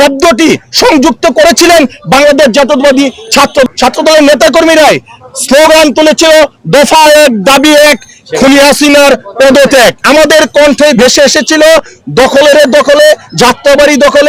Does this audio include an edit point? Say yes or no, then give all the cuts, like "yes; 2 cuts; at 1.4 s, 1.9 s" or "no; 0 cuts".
yes; 2 cuts; at 3.7 s, 10.0 s